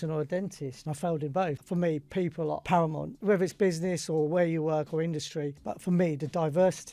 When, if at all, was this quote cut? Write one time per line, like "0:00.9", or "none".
0:01.6
0:02.7
0:05.6